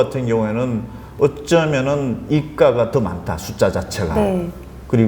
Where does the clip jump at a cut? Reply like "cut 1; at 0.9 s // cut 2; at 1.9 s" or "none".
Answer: none